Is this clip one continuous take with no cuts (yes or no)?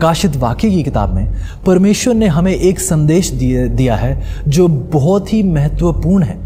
yes